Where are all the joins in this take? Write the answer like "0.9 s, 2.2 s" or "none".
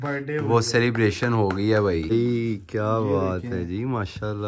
2.1 s